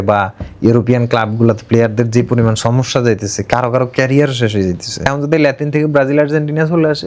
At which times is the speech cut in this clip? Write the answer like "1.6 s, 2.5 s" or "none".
5.1 s